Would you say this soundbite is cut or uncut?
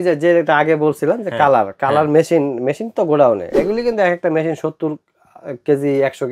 uncut